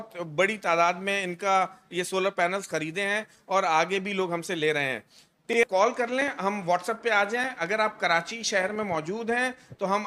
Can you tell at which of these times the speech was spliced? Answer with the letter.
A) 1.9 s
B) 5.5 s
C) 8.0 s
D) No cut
B